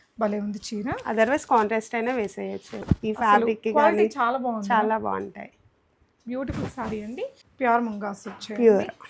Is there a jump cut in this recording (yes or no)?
yes